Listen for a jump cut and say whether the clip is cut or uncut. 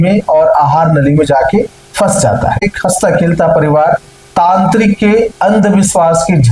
cut